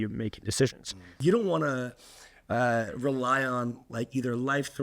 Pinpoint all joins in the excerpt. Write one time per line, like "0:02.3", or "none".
0:01.1

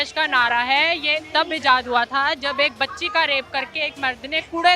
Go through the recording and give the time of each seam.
none

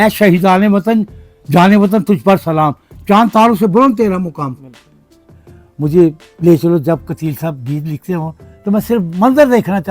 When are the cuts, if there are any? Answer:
0:05.3

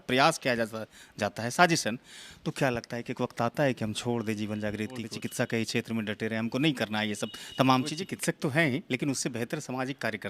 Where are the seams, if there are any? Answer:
0:05.1
0:08.0

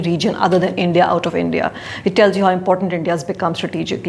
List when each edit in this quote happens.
none

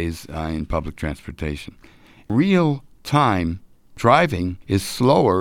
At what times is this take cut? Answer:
0:02.3
0:04.0
0:04.6

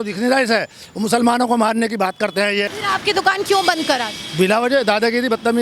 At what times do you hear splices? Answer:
0:02.7

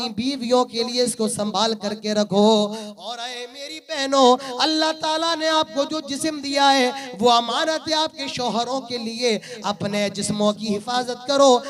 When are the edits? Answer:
none

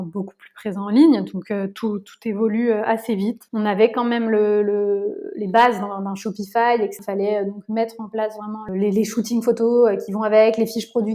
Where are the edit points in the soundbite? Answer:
0:03.4
0:07.0
0:08.7

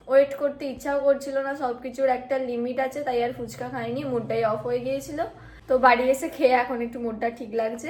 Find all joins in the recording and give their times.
none

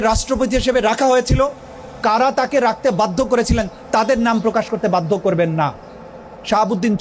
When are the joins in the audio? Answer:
none

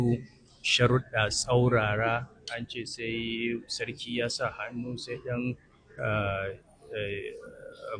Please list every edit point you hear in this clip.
none

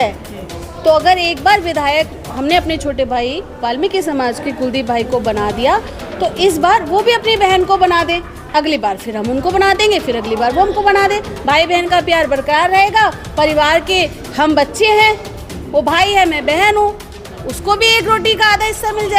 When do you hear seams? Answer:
none

